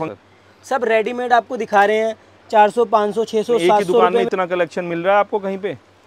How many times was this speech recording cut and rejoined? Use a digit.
1